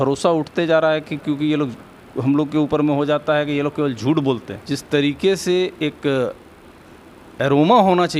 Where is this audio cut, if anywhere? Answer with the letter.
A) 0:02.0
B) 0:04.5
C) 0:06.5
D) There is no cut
B